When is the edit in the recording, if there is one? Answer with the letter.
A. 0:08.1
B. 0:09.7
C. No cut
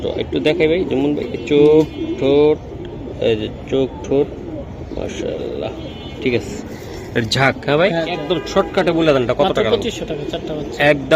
A